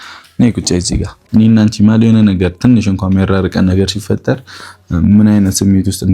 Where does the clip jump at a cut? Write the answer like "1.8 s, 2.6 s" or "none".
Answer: 1.2 s